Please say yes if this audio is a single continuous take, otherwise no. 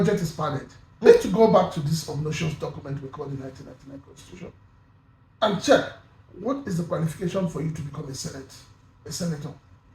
no